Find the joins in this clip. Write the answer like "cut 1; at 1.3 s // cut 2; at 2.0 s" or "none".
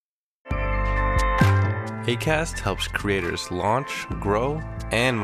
none